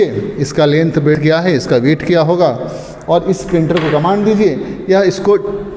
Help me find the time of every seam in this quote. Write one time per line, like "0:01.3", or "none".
0:01.2